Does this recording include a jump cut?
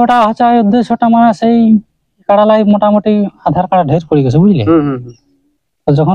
no; 0 cuts

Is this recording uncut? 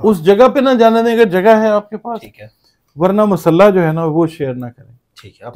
yes; 0 cuts

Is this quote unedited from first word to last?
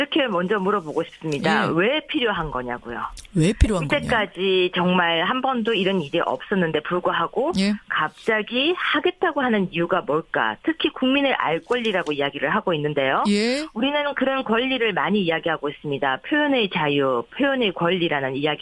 no; 1 cut; at 7.3 s

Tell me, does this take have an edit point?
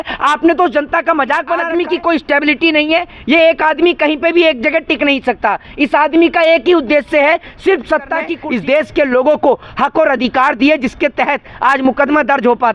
yes; 2 cuts; at 1.6 s, 8.3 s

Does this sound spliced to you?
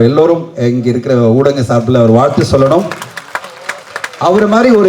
no; 0 cuts

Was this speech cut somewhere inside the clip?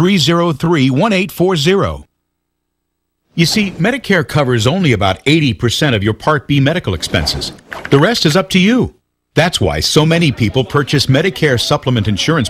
no; 0 cuts

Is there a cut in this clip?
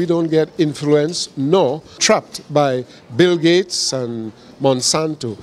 yes; 1 cut; at 2.0 s

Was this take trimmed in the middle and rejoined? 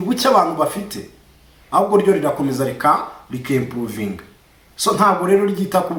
no; 0 cuts

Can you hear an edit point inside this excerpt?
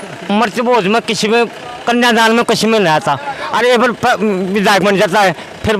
no; 0 cuts

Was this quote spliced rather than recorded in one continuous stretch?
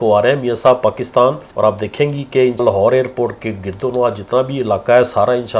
yes; 2 cuts; at 1.5 s, 2.6 s

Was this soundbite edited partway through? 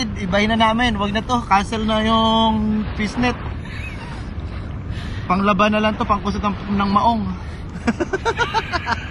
no; 0 cuts

